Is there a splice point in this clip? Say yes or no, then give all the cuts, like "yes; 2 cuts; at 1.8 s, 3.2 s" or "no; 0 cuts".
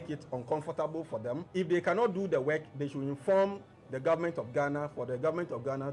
yes; 1 cut; at 1.5 s